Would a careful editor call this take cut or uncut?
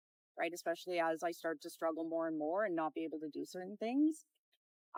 uncut